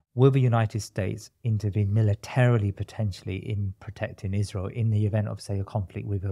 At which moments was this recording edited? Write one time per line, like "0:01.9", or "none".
none

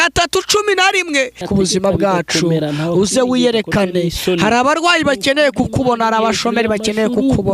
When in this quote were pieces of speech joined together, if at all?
0:01.4

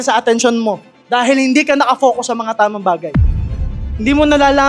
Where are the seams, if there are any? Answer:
0:00.9

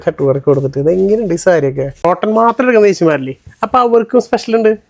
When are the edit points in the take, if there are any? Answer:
0:01.9

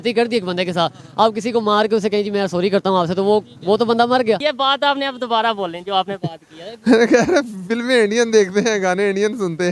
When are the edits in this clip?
0:04.4

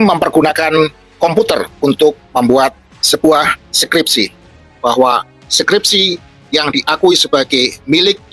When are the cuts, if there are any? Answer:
0:04.7

